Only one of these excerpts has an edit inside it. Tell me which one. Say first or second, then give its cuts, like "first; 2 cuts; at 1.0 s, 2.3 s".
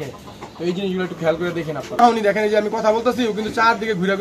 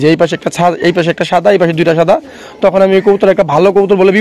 first; 1 cut; at 2.0 s